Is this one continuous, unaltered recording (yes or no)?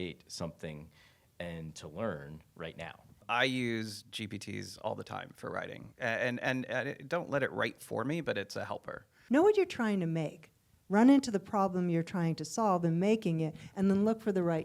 no